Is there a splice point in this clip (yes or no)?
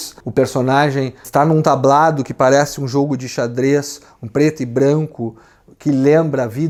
no